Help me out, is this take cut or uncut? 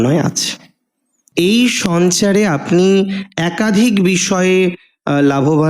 cut